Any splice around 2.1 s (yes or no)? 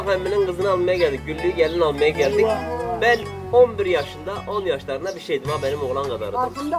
no